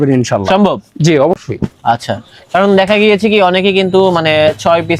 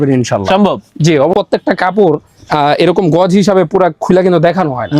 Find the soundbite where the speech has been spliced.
second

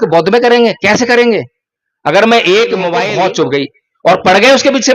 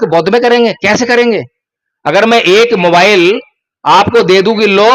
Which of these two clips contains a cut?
first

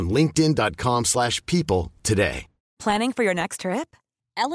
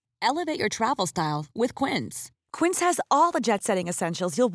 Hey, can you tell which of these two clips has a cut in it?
first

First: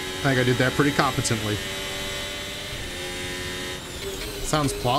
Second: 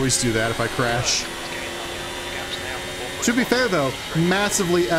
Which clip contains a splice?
first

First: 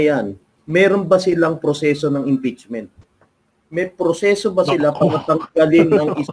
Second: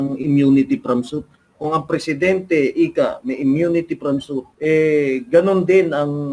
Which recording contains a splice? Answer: second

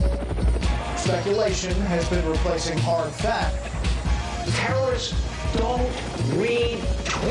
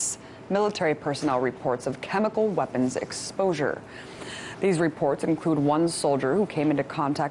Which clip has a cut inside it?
first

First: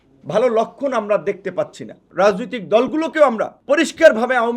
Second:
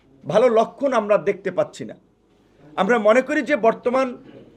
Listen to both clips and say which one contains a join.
first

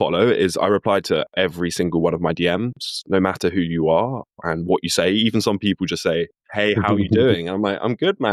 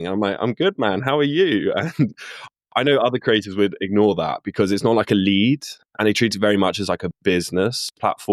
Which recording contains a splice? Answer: first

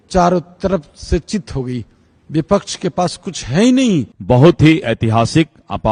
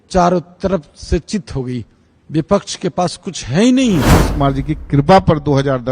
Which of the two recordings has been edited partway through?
second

